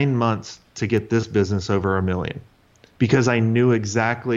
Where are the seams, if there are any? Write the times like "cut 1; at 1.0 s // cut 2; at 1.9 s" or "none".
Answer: none